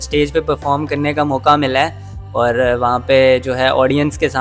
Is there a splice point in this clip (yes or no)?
no